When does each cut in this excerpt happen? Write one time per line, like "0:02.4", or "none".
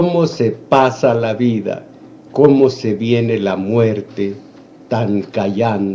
0:01.6